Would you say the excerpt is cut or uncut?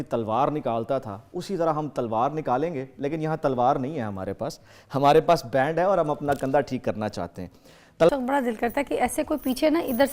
cut